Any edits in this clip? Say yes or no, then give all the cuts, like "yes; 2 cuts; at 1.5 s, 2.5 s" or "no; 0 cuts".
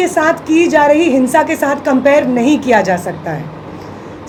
no; 0 cuts